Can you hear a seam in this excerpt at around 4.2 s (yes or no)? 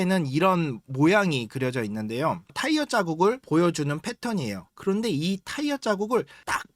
no